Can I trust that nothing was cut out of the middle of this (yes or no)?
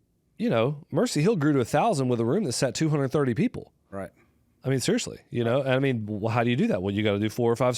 yes